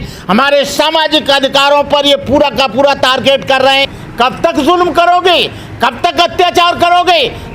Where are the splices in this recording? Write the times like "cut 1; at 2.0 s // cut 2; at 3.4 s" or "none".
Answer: cut 1; at 4.0 s